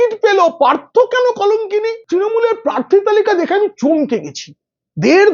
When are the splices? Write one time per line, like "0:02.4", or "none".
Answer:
0:02.0